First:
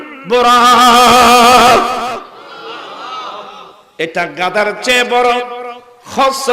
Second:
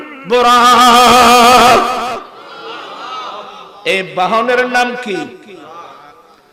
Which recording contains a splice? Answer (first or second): first